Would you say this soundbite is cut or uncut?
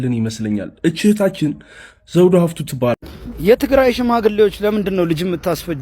cut